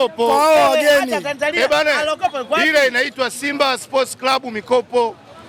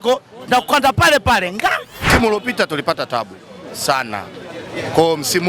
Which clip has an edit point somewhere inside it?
second; 1 cut; at 1.9 s

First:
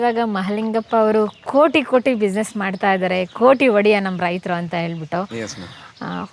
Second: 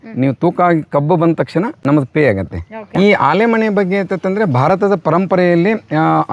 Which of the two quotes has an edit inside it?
second; 1 cut; at 2.8 s

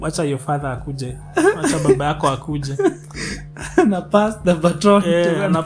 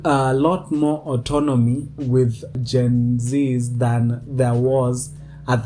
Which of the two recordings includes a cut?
second; 1 cut; at 2.0 s

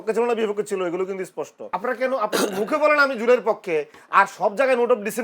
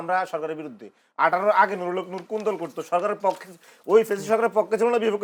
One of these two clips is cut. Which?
first; 1 cut; at 1.7 s

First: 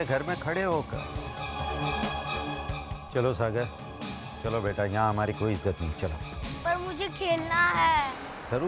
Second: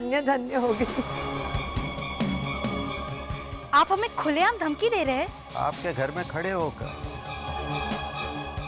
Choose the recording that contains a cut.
second; 1 cut; at 1.1 s

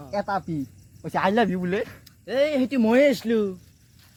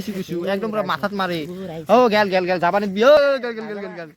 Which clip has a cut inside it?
second; 1 cut; at 3.2 s

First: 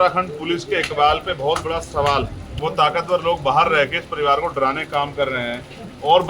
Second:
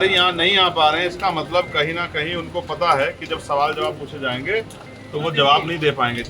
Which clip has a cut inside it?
first; 1 cut; at 2.4 s

